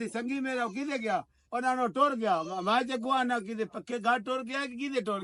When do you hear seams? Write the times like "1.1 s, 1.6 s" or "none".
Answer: none